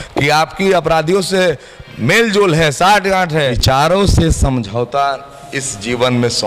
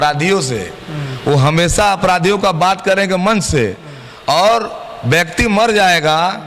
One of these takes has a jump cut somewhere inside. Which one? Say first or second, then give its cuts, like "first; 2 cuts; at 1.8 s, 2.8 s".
first; 1 cut; at 3.6 s